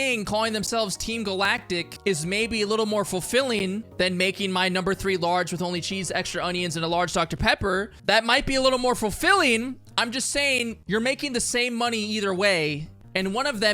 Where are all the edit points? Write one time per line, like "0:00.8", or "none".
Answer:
0:01.9
0:03.9